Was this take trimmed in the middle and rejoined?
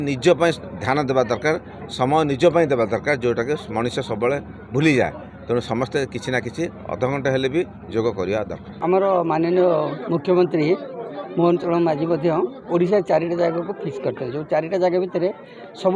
yes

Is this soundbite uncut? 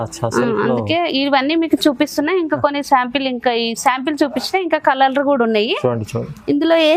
yes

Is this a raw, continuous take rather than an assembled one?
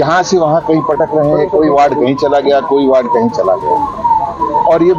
yes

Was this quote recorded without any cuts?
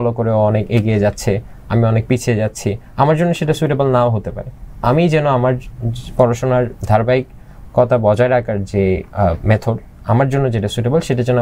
yes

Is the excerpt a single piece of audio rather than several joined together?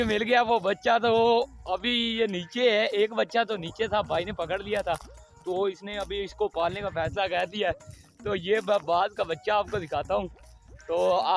yes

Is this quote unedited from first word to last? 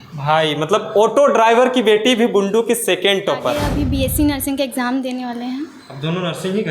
no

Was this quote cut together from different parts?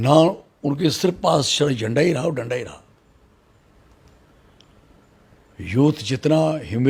no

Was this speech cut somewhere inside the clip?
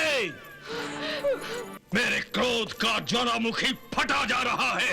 yes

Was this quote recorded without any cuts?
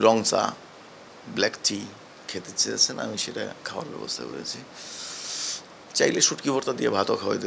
yes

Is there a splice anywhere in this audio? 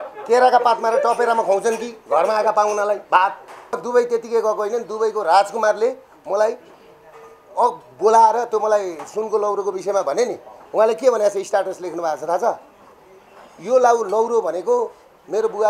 yes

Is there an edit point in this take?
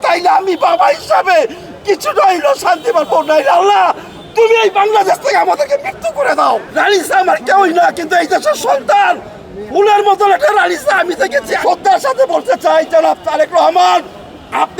yes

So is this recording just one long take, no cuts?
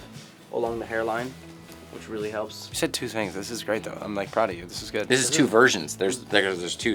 yes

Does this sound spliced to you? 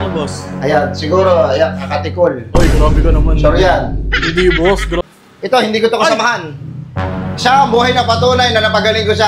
yes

